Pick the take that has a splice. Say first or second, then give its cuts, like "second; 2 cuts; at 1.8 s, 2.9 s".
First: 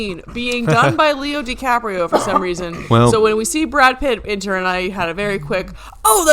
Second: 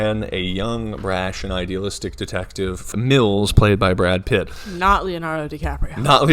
second; 1 cut; at 2.9 s